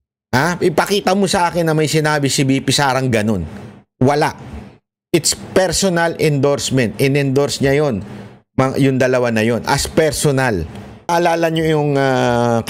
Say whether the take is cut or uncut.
cut